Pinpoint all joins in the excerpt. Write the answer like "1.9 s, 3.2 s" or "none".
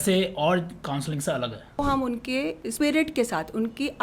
1.8 s, 2.6 s

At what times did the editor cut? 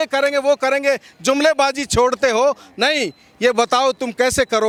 none

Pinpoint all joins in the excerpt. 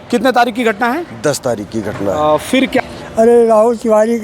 2.8 s

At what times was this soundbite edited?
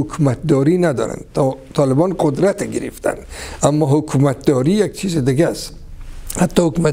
none

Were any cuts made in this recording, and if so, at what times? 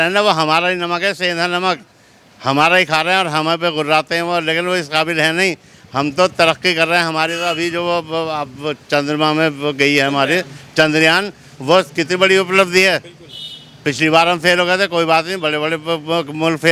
none

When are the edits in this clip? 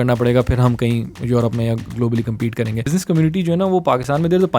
2.9 s

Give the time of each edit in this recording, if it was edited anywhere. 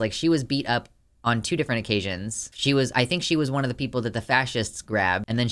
none

